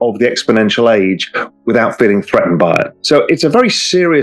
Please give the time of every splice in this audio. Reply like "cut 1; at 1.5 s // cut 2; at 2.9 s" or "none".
cut 1; at 2.9 s